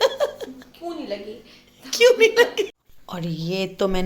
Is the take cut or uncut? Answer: cut